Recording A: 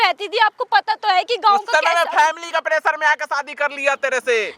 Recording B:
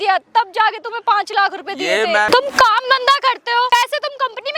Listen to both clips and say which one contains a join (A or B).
B